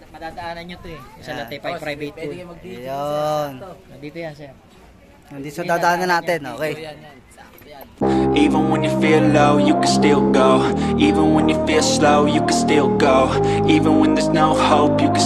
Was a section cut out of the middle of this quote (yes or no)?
yes